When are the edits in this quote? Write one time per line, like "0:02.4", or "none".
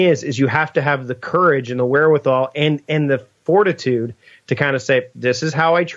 none

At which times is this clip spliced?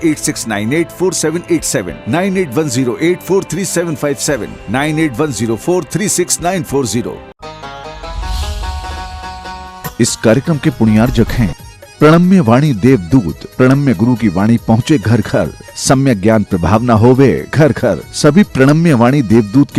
0:07.3

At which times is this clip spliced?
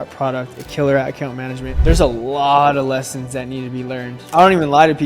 0:01.8
0:04.2

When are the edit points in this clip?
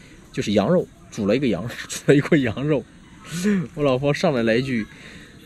none

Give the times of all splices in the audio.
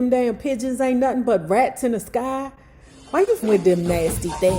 0:03.5

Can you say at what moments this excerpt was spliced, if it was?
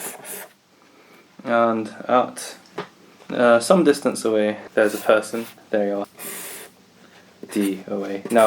0:06.1

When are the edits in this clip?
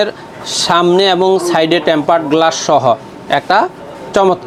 none

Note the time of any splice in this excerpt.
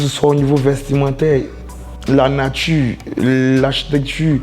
none

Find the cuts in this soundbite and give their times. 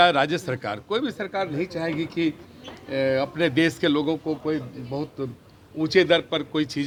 none

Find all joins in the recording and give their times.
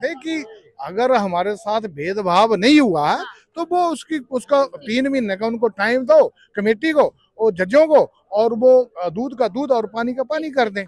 none

